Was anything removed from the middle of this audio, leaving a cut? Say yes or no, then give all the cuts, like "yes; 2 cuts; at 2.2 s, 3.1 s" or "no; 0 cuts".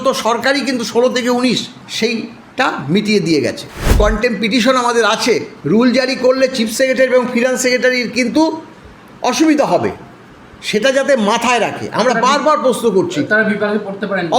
yes; 3 cuts; at 1.8 s, 3.9 s, 5.5 s